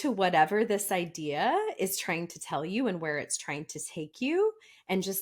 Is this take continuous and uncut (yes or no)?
yes